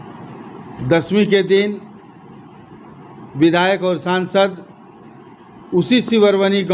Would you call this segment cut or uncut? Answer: uncut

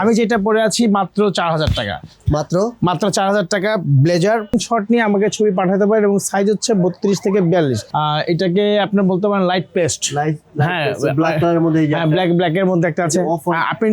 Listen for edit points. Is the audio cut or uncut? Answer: cut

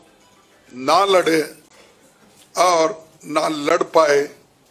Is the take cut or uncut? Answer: uncut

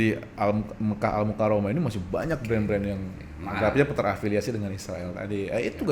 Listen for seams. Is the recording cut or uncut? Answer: uncut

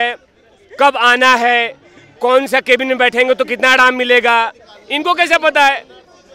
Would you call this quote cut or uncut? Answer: uncut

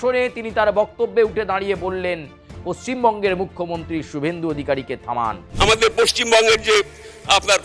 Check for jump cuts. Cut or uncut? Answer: cut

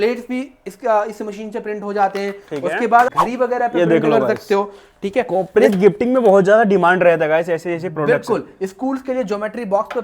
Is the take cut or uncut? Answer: cut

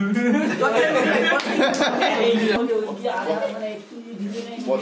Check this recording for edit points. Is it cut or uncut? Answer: cut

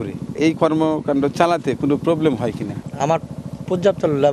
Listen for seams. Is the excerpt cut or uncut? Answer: uncut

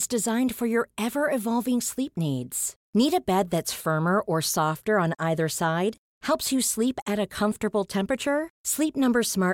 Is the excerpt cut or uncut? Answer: uncut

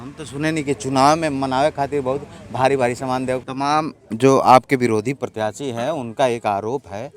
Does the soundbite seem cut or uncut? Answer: cut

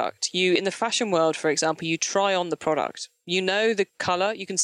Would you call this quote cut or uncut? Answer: uncut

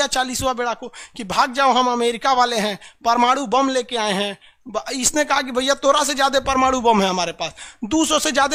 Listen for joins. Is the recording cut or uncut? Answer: uncut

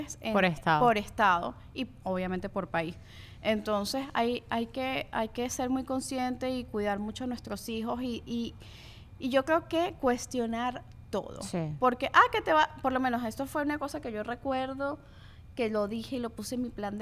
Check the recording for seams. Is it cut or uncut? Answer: uncut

